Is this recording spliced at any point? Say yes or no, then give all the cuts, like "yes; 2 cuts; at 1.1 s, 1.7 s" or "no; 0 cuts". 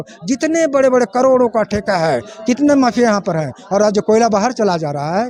no; 0 cuts